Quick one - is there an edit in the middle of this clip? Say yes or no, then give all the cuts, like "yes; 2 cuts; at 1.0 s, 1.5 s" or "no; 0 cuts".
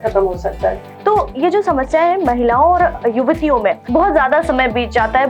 yes; 2 cuts; at 0.9 s, 3.8 s